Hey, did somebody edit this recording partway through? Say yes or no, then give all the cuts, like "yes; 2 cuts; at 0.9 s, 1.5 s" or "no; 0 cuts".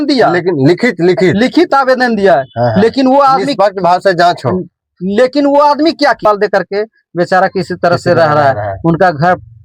yes; 1 cut; at 6.2 s